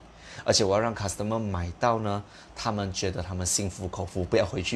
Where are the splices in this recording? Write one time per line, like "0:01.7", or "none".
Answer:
none